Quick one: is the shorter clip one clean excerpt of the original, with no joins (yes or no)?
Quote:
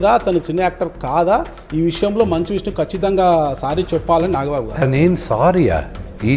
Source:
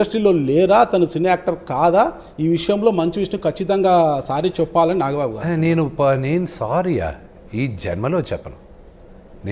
no